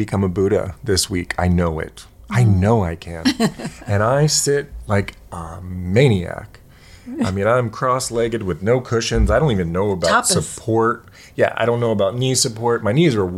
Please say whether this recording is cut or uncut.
uncut